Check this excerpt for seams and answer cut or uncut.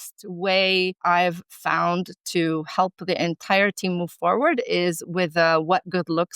cut